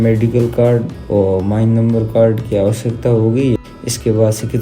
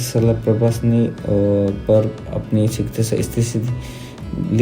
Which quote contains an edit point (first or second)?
first